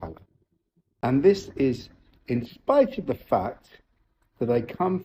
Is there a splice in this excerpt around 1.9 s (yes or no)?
no